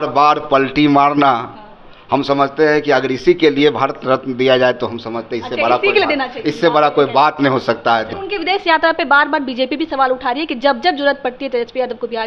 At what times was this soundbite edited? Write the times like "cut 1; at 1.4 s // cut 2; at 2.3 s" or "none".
cut 1; at 8.1 s